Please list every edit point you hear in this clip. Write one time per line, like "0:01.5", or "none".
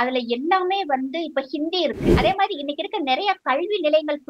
0:02.2